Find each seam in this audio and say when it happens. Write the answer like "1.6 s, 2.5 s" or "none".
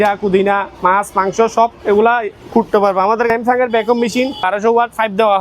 3.3 s, 4.4 s